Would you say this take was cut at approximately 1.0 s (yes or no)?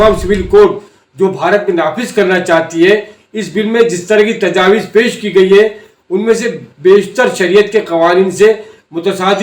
no